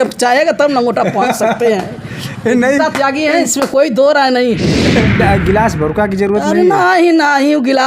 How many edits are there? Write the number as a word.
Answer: one